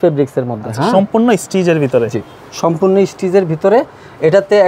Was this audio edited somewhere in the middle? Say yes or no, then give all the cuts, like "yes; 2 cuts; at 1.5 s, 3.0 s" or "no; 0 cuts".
no; 0 cuts